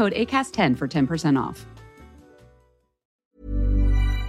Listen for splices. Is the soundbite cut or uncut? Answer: cut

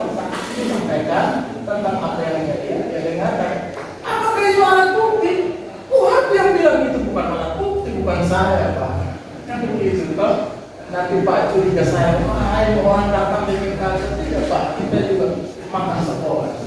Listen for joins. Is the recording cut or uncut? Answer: uncut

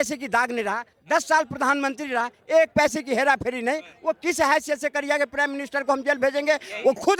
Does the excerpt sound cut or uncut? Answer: uncut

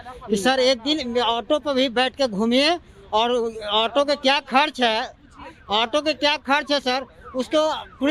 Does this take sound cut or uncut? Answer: uncut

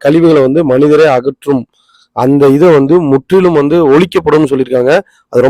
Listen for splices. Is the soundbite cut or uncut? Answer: uncut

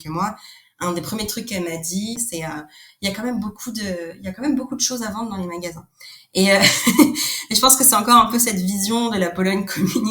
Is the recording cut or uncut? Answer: cut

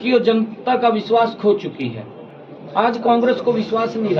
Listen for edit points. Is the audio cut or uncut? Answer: uncut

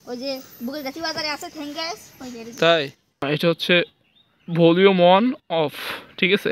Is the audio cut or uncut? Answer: cut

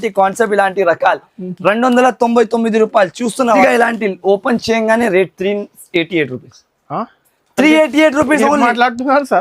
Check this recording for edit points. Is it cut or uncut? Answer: cut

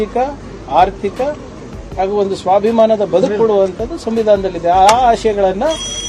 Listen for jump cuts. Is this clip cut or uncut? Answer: uncut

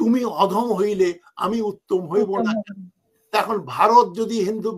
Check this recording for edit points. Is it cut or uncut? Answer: uncut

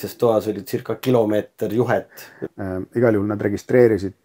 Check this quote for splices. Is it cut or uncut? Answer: cut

